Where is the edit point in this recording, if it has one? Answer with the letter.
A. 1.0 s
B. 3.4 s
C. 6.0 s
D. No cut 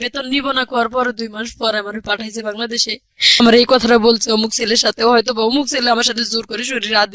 B